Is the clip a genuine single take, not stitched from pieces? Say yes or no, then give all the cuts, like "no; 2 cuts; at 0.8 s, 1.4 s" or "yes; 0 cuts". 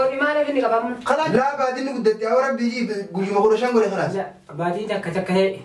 no; 1 cut; at 1.3 s